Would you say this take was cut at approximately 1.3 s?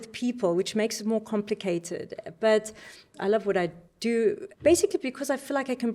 no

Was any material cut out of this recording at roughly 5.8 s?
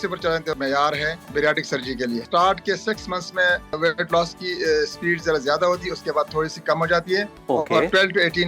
no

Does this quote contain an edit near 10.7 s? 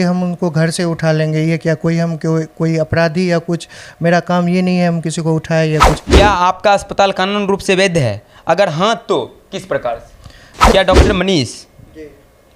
yes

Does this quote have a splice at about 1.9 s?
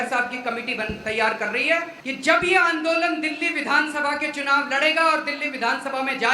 yes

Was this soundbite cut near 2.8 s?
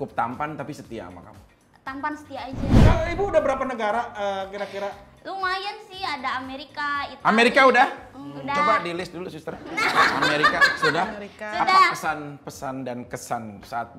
yes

